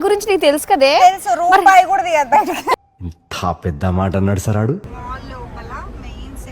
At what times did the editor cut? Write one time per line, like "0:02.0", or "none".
0:04.8